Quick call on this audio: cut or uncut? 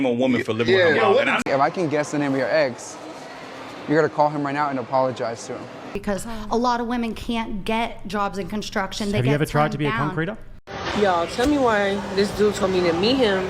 cut